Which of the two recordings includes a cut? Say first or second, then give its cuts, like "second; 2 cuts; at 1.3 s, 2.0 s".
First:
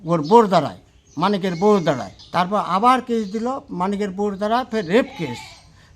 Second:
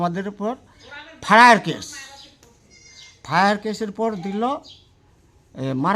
first; 1 cut; at 2.1 s